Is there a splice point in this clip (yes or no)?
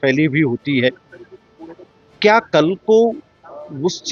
no